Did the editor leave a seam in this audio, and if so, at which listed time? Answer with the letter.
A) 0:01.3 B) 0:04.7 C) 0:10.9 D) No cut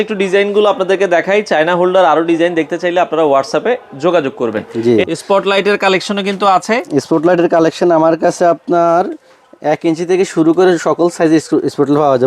B